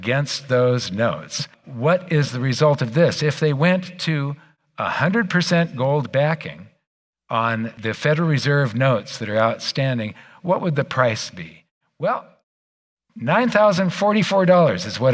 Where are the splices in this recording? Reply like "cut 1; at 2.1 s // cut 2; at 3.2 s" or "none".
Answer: cut 1; at 1.6 s // cut 2; at 7.8 s